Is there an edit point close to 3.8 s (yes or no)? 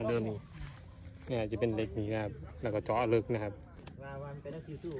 yes